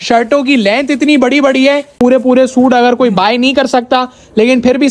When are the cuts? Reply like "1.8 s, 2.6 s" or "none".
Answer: 1.9 s